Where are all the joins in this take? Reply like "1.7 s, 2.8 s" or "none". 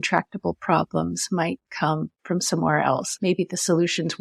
2.1 s, 3.1 s